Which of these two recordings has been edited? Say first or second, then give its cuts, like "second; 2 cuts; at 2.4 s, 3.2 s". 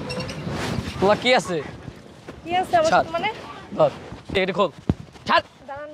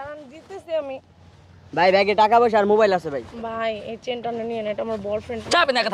first; 1 cut; at 4.1 s